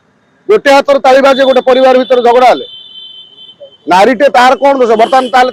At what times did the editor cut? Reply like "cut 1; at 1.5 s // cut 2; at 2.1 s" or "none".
none